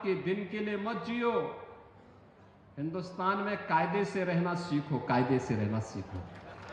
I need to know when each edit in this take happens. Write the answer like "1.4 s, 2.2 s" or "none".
none